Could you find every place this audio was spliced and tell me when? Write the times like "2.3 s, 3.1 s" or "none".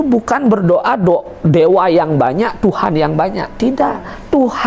none